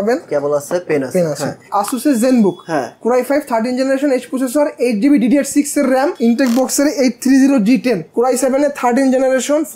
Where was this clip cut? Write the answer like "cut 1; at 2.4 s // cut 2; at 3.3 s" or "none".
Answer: cut 1; at 1.7 s // cut 2; at 6.2 s // cut 3; at 8.1 s